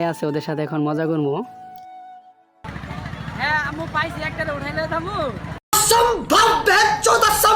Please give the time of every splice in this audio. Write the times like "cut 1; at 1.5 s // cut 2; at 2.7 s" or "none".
cut 1; at 5.8 s

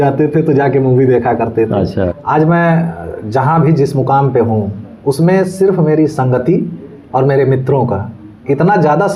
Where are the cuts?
cut 1; at 2.2 s

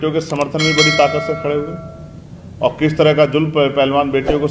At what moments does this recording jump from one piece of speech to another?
none

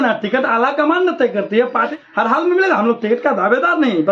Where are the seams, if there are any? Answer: none

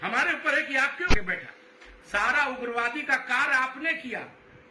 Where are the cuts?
cut 1; at 1.1 s

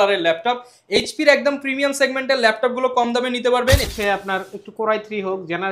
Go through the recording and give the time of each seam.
cut 1; at 3.9 s

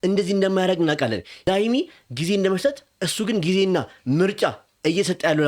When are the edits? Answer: cut 1; at 1.3 s

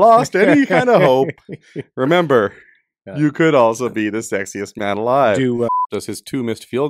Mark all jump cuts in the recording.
cut 1; at 5.7 s

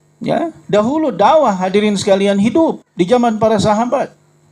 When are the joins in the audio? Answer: none

